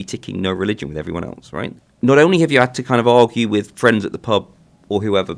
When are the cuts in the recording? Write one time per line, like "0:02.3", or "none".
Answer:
0:01.8